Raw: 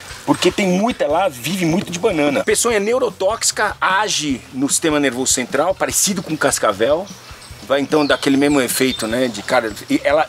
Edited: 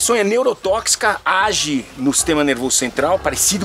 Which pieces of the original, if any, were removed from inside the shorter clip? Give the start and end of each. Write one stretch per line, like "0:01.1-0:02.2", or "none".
none